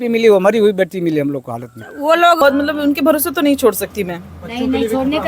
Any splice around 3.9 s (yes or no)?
no